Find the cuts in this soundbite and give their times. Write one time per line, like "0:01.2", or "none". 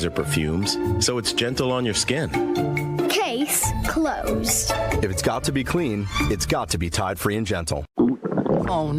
0:07.9